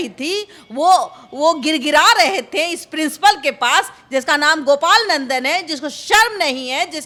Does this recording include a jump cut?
no; 0 cuts

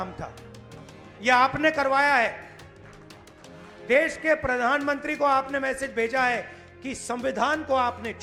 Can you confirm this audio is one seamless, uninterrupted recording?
yes; 0 cuts

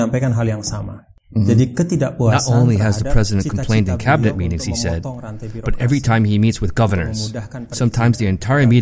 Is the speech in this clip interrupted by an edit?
yes; 1 cut; at 2.3 s

